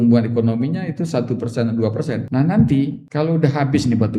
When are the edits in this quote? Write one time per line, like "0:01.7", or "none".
0:02.2
0:03.0